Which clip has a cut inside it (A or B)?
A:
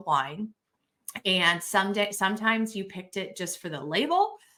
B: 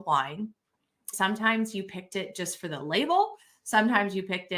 B